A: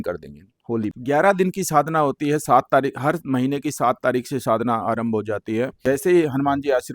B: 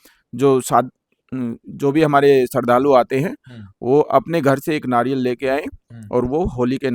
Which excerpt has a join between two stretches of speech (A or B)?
A